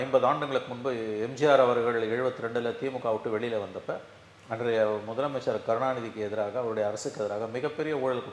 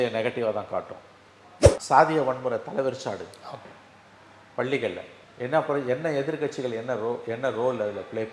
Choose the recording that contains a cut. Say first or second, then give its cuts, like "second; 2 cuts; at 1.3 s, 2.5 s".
second; 1 cut; at 1.7 s